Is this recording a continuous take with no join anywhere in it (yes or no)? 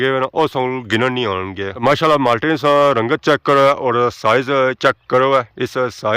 no